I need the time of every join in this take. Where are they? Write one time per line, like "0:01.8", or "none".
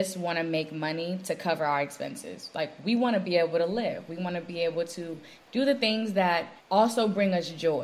0:05.4
0:06.6